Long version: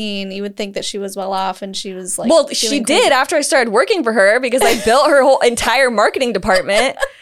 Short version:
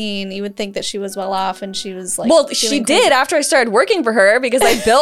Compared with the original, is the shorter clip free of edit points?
yes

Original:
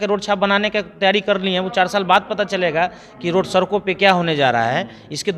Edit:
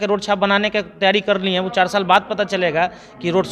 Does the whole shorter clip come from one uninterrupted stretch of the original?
yes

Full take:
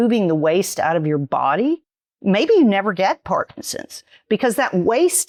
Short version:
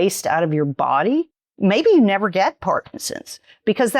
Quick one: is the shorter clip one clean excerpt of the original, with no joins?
no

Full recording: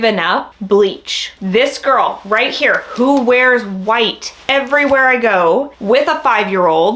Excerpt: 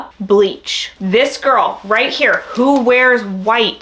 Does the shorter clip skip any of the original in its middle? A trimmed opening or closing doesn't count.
no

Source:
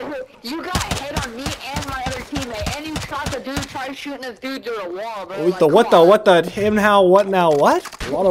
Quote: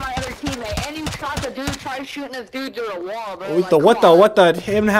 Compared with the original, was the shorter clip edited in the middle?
no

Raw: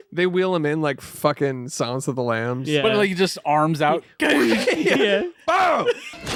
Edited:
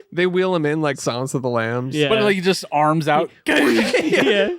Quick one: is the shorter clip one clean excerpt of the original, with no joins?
no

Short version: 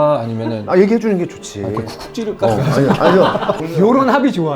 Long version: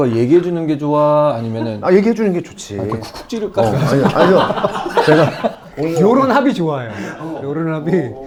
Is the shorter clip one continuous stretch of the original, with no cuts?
no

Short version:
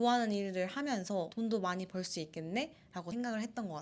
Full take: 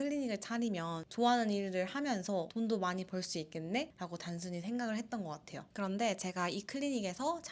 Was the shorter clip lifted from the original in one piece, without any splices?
no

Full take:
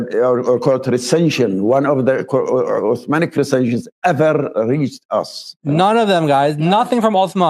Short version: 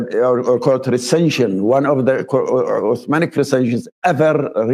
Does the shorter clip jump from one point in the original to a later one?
no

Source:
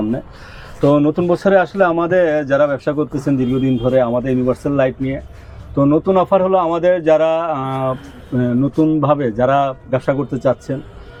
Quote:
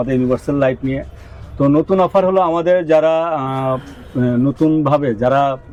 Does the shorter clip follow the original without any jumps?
yes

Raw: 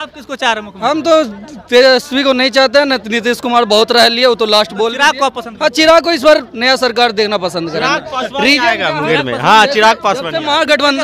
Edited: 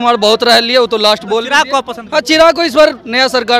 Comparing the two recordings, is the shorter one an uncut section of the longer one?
yes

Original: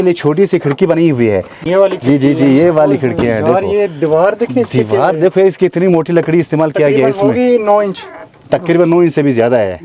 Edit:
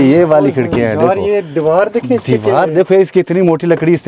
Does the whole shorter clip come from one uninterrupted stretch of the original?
yes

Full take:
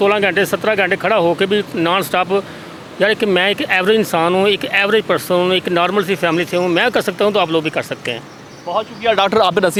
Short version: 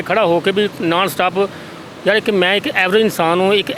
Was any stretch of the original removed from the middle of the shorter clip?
no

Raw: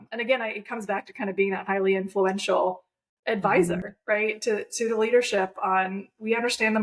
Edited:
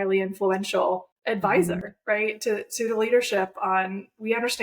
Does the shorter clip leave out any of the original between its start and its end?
yes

